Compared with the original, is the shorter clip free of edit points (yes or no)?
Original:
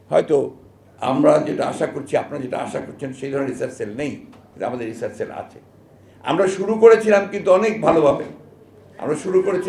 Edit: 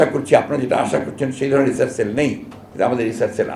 yes